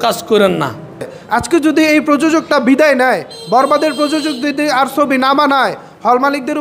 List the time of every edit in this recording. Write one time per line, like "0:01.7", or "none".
0:01.2